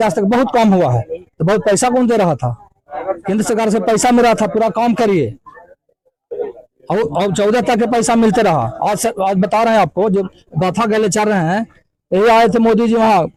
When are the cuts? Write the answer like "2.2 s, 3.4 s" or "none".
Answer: none